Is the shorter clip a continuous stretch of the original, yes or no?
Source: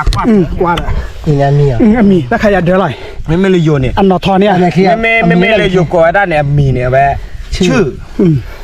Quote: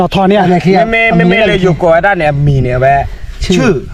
yes